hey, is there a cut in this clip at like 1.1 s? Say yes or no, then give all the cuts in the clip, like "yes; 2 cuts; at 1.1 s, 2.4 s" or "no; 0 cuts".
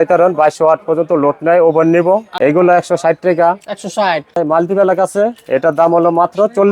no; 2 cuts; at 2.3 s, 4.4 s